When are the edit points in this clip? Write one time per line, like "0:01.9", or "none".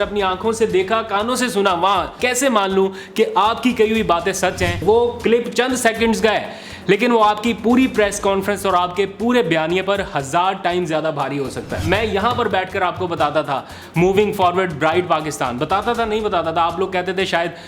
0:02.2
0:04.8
0:11.8